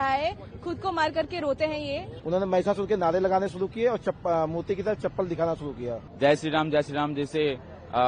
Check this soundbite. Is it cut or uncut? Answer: cut